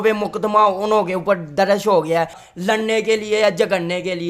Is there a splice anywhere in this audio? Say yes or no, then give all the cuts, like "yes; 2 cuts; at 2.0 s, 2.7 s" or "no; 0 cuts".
yes; 1 cut; at 2.4 s